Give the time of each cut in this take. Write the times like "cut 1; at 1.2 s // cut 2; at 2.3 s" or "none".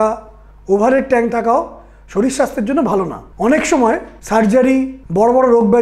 cut 1; at 3.2 s // cut 2; at 4.1 s // cut 3; at 5.0 s